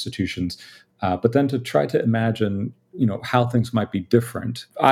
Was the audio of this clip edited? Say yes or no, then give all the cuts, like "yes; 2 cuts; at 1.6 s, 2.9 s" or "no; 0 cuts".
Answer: no; 0 cuts